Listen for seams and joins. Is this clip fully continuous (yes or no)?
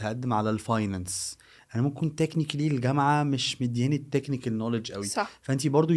yes